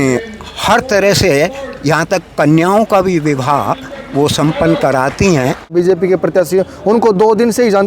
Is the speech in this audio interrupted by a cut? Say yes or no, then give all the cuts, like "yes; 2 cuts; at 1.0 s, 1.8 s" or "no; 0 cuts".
yes; 1 cut; at 5.7 s